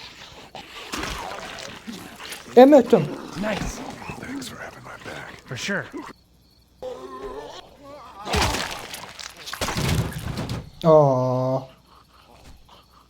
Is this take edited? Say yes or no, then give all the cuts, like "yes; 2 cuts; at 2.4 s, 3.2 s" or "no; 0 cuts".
yes; 1 cut; at 6.8 s